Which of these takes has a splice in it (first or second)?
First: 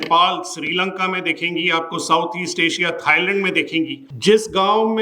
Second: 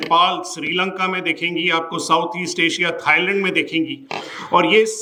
first